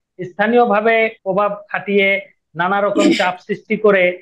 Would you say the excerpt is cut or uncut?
cut